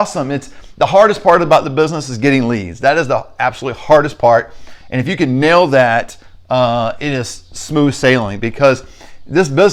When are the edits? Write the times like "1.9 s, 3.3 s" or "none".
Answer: none

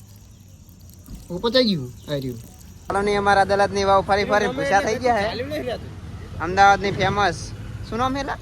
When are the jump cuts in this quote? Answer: 2.7 s

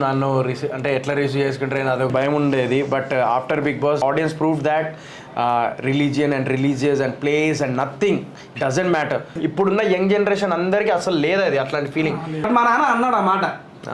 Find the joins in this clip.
2.1 s, 4.0 s, 9.3 s, 12.5 s

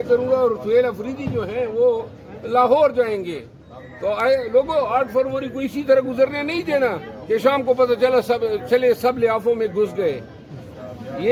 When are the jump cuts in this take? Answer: none

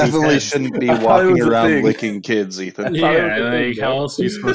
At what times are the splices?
none

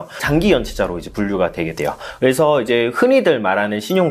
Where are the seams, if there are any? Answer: none

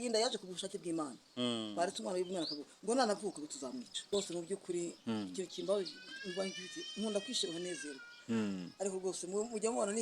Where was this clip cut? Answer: 3.9 s

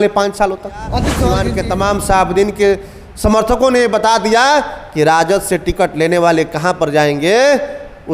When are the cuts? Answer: 1.1 s

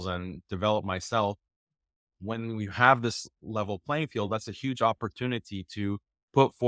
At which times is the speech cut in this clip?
1.9 s

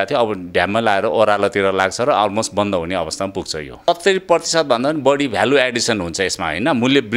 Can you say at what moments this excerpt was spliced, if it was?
3.9 s

